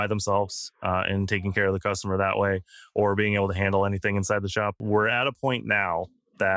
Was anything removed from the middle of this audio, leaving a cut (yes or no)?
yes